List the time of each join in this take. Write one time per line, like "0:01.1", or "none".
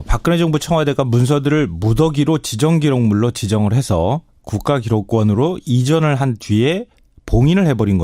0:05.2